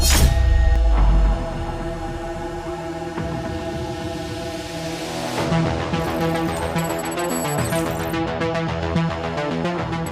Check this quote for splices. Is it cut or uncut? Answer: uncut